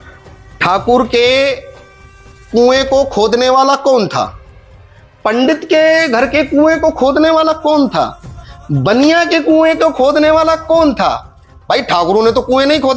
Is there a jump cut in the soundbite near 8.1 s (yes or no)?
no